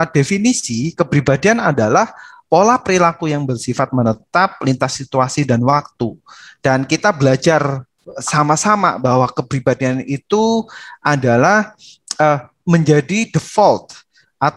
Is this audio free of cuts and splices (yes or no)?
yes